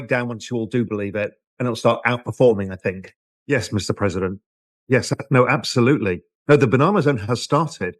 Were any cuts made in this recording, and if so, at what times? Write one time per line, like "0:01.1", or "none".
0:03.3